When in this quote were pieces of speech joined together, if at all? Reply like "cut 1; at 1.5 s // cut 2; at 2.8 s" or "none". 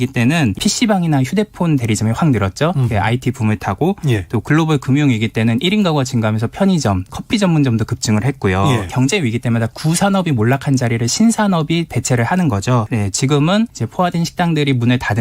cut 1; at 7.1 s // cut 2; at 8.9 s // cut 3; at 12.8 s